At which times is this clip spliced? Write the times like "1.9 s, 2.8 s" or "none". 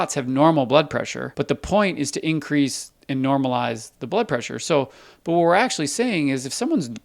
1.2 s

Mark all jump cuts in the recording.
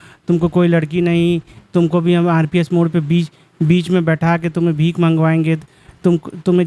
none

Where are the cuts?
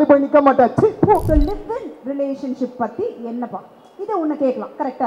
1.3 s

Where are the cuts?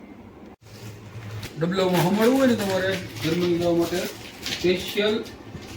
1.5 s

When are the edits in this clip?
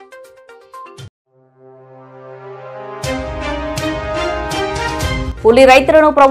5.3 s

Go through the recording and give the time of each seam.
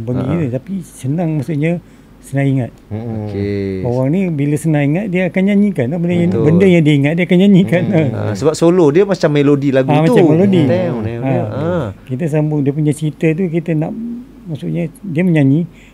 none

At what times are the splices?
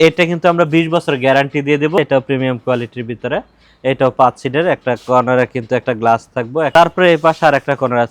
2.0 s, 6.7 s

